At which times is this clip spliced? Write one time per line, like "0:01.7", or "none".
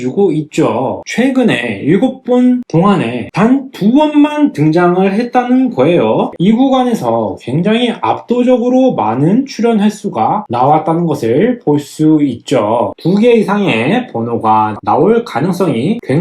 0:06.3
0:12.9